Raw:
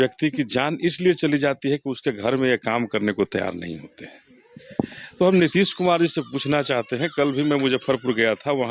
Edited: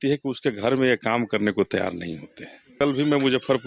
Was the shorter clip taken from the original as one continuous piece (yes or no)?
no